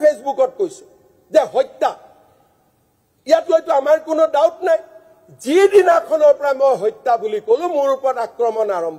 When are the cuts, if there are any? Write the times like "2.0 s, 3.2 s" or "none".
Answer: none